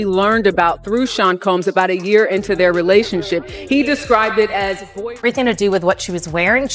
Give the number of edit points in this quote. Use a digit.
1